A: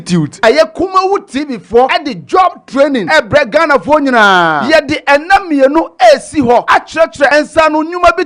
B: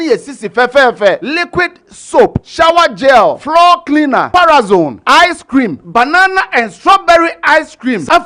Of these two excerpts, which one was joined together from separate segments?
A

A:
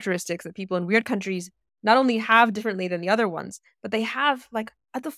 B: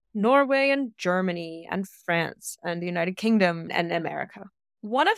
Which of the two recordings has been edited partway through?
B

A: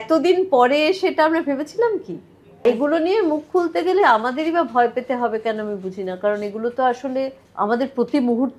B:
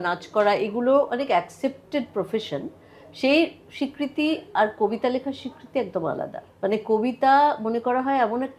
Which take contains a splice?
A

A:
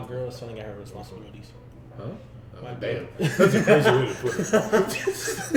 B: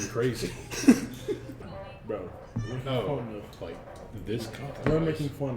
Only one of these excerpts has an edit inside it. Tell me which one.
B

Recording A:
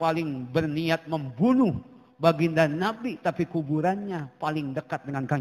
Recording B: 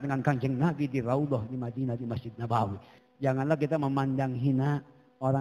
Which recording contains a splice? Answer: B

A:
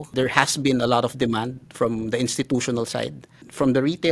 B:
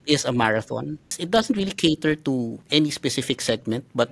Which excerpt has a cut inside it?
B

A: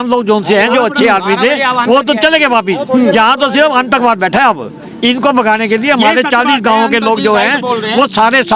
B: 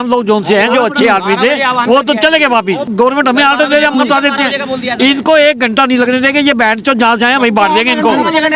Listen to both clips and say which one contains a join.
B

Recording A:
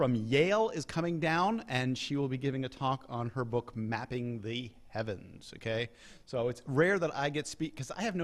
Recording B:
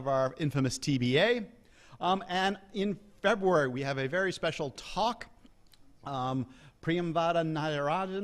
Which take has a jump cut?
B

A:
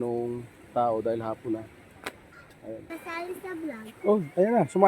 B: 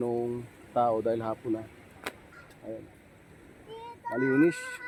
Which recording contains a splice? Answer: A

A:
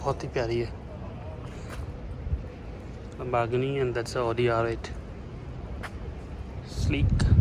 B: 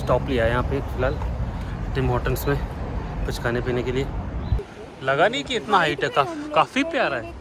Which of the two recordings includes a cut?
B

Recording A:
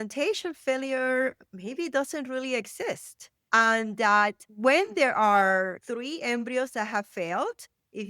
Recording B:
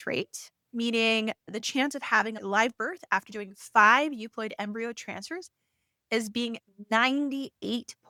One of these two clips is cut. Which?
A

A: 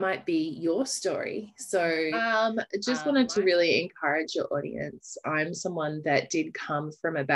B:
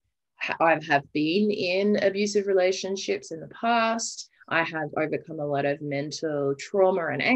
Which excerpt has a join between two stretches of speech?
A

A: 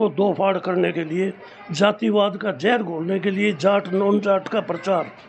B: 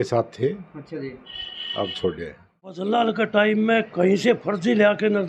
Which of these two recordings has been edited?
B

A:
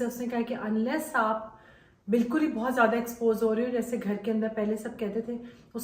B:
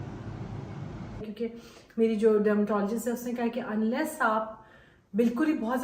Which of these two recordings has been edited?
B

